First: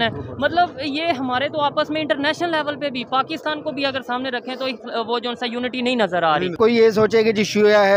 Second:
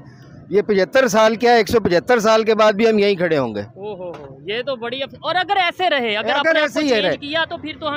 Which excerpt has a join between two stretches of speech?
first; 1 cut; at 6.6 s

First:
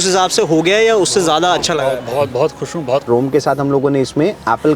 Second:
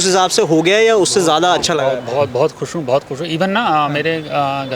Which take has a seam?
first; 1 cut; at 3.1 s

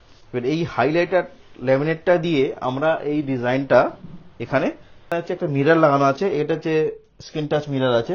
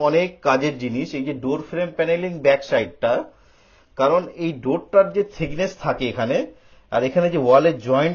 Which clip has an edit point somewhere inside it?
first; 1 cut; at 5.1 s

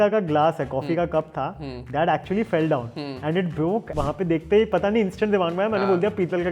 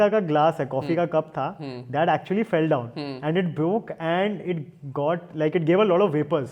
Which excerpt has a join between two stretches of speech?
first; 1 cut; at 3.9 s

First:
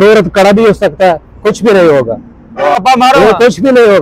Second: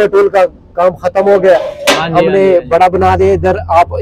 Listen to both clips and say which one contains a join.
first; 1 cut; at 2.8 s

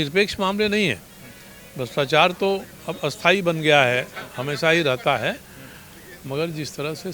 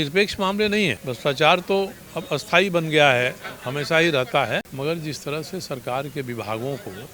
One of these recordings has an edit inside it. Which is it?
second; 2 cuts; at 1.1 s, 4.7 s

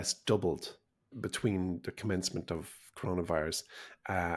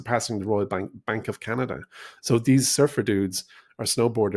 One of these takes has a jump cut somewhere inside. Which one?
first; 1 cut; at 1.1 s

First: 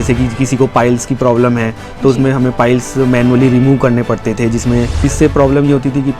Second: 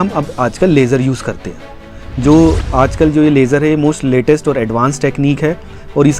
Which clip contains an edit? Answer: first; 1 cut; at 4.9 s

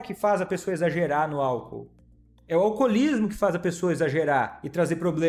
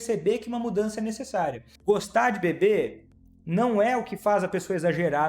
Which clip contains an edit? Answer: second; 1 cut; at 1.7 s

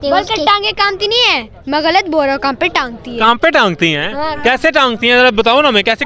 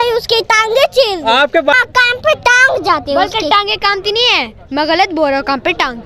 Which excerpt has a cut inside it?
second; 1 cut; at 1.7 s

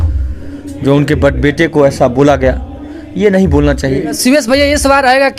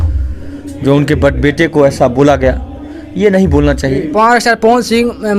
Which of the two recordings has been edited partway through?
second; 1 cut; at 4.1 s

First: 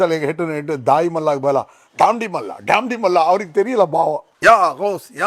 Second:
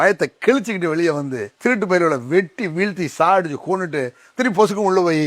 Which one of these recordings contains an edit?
second; 1 cut; at 1.4 s

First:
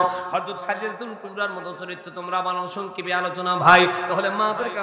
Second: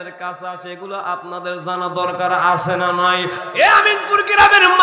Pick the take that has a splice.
second; 1 cut; at 3.4 s

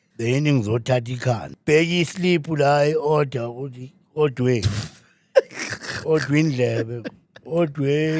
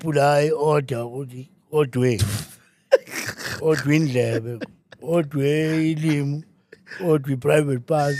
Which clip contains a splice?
first; 1 cut; at 1.5 s

